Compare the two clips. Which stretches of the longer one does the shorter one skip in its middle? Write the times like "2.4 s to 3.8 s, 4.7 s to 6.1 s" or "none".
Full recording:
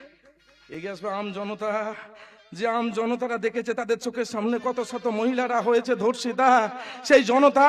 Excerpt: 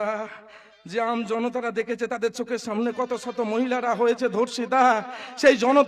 none